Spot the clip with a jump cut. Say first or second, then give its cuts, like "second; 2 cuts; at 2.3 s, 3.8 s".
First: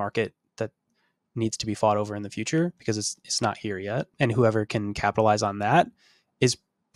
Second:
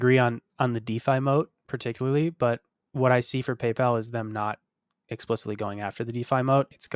first; 1 cut; at 4.1 s